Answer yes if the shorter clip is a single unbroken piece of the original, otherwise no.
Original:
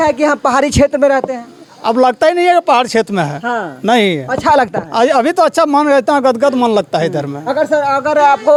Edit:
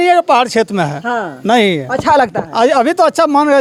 yes